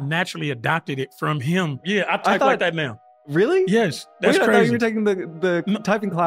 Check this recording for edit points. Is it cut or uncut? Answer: cut